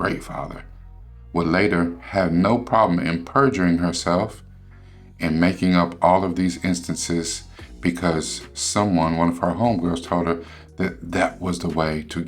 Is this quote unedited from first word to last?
yes; 0 cuts

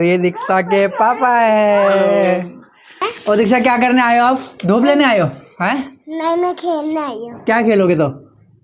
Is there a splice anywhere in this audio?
no; 0 cuts

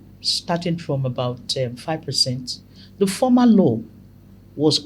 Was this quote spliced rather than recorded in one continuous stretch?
no; 0 cuts

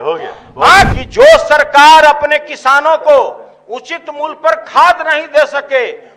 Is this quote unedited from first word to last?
no; 1 cut; at 0.9 s

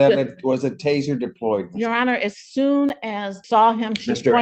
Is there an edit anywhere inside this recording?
yes; 1 cut; at 3.3 s

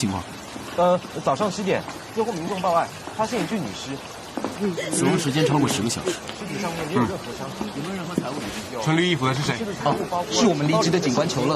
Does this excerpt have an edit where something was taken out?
yes; 1 cut; at 3.3 s

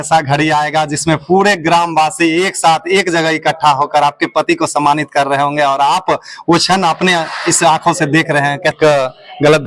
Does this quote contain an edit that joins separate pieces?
yes; 1 cut; at 8.8 s

